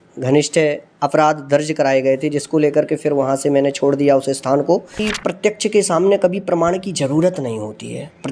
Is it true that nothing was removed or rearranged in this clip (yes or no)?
no